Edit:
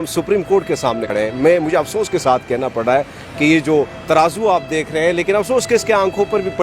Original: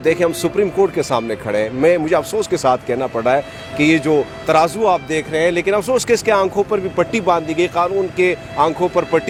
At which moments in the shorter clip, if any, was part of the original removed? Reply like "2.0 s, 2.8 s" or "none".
1.0 s